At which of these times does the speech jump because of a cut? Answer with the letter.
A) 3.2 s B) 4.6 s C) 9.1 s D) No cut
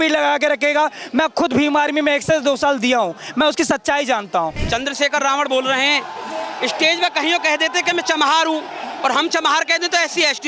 B